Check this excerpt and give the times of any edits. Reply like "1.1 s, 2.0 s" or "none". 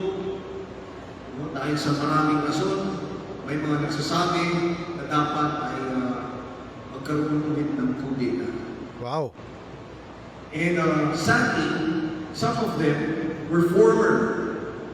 12.3 s

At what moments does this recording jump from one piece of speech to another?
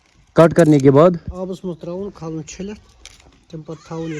1.3 s

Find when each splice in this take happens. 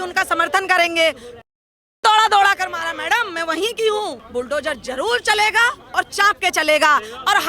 4.2 s

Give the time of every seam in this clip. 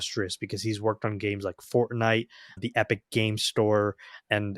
2.6 s

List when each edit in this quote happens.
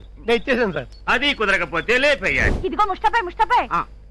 2.4 s

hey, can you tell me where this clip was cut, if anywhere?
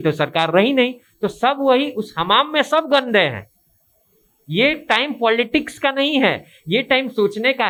none

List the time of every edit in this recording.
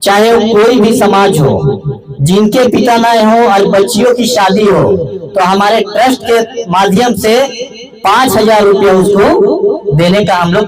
none

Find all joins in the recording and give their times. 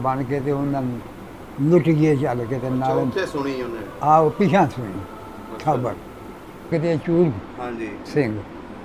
6.7 s

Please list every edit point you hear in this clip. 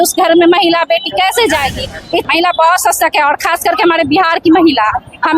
2.2 s

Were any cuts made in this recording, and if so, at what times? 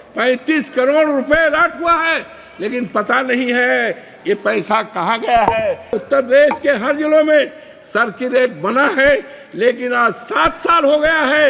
5.9 s

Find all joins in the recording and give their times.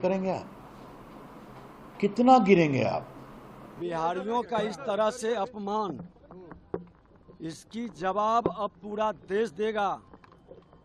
3.8 s

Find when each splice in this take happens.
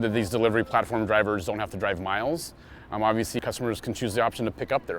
3.4 s

